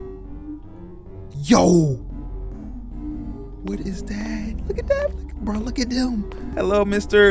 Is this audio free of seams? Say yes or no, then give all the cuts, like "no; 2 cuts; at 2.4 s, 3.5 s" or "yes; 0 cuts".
no; 1 cut; at 6.4 s